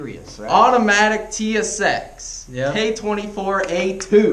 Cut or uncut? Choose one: uncut